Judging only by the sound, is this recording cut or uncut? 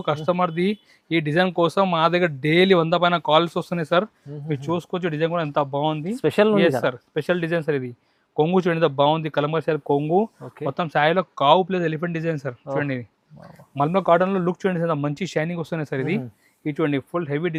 uncut